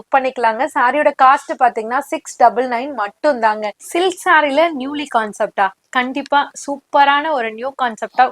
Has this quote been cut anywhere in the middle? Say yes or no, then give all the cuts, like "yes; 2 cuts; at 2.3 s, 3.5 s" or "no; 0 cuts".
yes; 1 cut; at 3.8 s